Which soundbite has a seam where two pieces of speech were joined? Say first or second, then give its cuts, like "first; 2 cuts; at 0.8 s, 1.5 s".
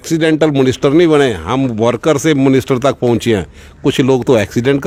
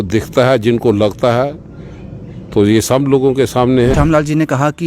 second; 1 cut; at 3.9 s